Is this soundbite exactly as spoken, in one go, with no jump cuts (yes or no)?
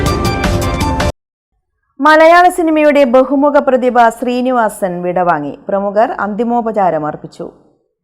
yes